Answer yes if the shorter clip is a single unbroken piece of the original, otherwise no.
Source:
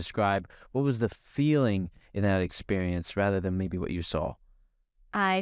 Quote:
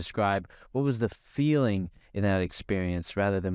yes